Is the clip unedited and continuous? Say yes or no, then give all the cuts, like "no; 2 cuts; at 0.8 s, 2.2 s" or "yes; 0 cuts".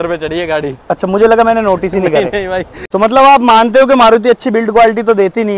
no; 1 cut; at 2.7 s